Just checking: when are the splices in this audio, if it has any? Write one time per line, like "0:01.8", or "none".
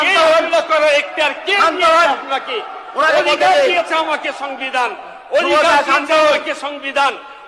none